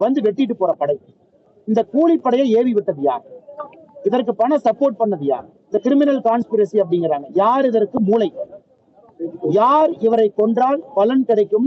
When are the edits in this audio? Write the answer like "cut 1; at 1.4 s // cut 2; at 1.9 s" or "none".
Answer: none